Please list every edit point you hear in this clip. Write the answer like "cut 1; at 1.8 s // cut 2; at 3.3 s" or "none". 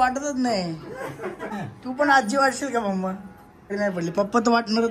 cut 1; at 1.5 s // cut 2; at 3.7 s